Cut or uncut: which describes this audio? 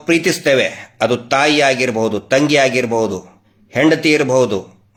uncut